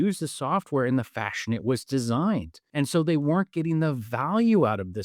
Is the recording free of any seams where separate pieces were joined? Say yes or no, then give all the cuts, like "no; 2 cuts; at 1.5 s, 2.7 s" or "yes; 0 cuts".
no; 1 cut; at 2.6 s